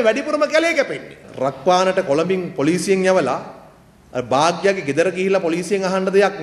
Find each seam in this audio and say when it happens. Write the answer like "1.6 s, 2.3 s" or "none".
1.2 s